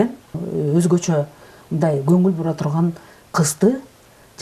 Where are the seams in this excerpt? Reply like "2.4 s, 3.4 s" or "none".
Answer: none